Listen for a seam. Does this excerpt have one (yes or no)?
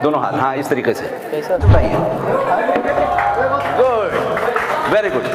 yes